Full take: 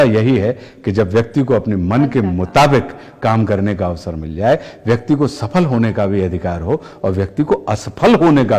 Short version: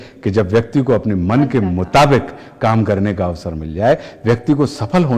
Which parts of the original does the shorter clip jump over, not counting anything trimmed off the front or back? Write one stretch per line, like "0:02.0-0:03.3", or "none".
none

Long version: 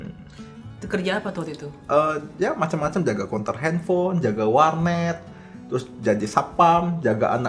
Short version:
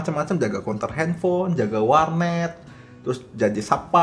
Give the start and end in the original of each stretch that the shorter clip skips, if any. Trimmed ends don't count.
none

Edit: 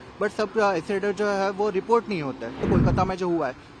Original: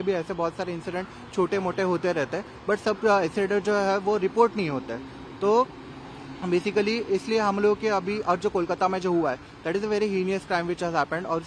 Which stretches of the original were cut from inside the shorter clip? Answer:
0:05.1-0:08.5

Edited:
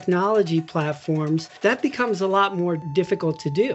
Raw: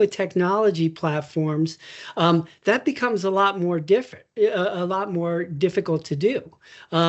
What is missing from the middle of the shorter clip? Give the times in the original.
0:01.8-0:02.5
0:03.8-0:05.5

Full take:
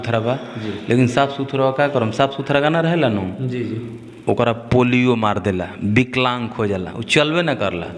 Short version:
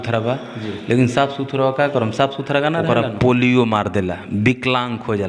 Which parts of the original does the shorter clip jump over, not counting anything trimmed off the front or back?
0:02.8-0:04.4

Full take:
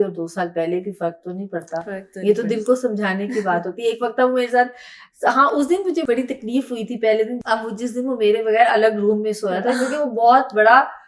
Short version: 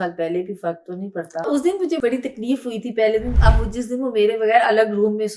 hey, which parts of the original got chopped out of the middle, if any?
0:01.8-0:05.5

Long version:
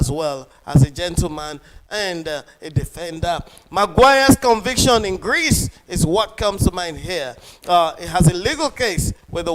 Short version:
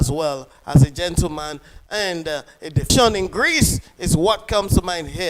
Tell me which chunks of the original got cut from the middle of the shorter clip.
0:02.9-0:04.8

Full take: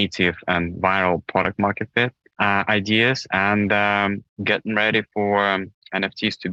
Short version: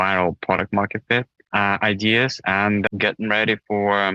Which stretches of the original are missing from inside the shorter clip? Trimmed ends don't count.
0:03.7-0:04.3

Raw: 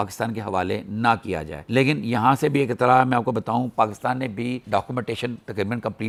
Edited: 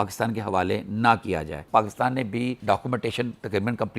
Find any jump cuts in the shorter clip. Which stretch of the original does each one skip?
0:01.7-0:03.7

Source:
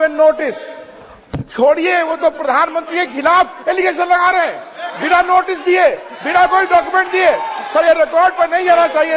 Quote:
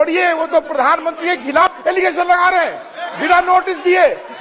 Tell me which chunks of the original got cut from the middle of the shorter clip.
0:03.3-0:03.4

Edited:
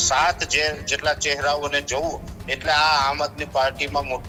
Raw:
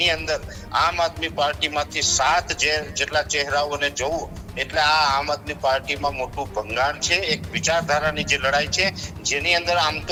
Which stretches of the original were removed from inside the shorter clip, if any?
none

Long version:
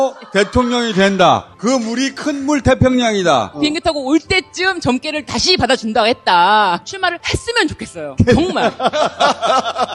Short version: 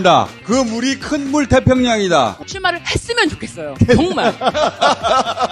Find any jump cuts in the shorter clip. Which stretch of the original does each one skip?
0:03.6-0:06.8

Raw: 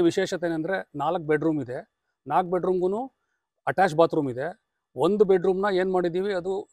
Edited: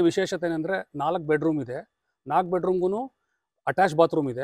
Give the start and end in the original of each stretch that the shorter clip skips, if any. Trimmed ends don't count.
none

